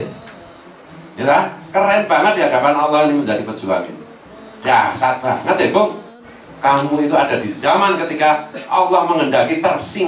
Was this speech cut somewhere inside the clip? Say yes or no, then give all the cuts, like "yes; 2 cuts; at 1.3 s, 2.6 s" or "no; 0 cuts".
yes; 1 cut; at 6.4 s